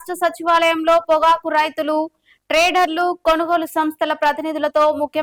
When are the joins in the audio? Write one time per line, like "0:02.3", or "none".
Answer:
none

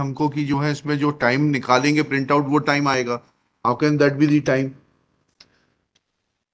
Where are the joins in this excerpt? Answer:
none

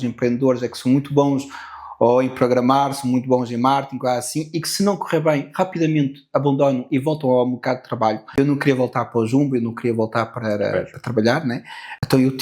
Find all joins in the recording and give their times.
0:08.3

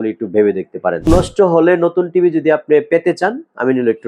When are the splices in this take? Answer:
0:01.1

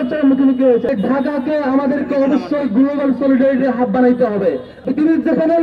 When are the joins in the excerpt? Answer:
0:00.9
0:04.7

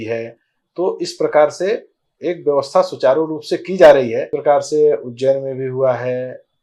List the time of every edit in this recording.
0:04.3

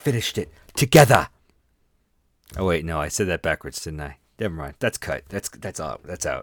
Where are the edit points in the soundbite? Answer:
none

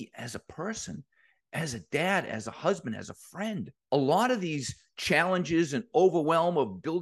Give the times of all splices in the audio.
0:03.7

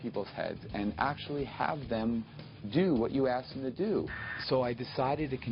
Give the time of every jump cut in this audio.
0:04.2

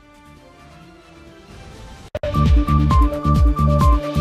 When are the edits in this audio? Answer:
0:02.2

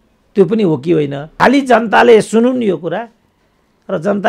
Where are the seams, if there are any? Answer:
0:01.2

